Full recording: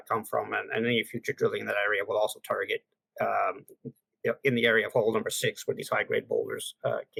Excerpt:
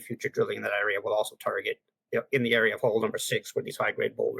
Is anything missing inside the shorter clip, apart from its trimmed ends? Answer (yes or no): yes